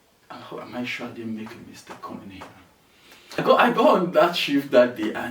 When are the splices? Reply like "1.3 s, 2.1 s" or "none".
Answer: 3.4 s